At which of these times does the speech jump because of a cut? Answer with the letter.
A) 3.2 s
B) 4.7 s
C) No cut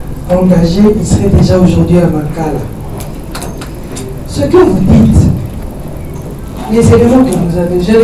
C